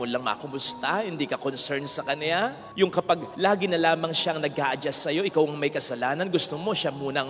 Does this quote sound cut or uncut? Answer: uncut